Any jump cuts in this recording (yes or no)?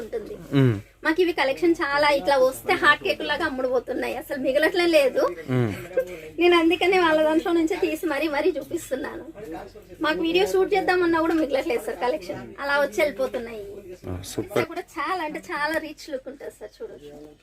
yes